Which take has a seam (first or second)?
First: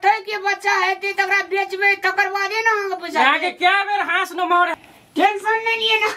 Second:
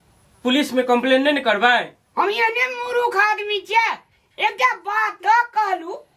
first